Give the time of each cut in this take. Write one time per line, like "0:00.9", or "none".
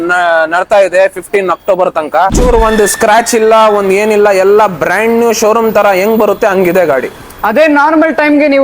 0:02.4